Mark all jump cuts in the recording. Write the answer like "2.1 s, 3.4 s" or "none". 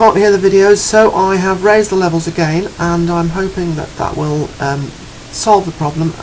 none